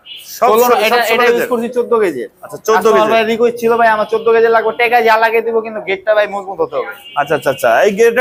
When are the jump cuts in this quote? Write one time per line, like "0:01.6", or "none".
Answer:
none